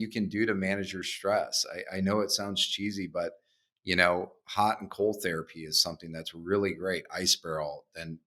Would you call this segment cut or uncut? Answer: uncut